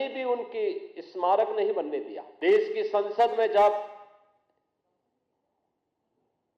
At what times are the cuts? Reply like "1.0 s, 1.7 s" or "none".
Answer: 2.2 s